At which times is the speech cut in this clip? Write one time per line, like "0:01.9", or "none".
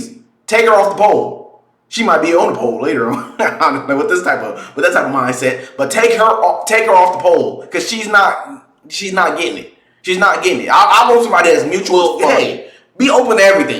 0:12.0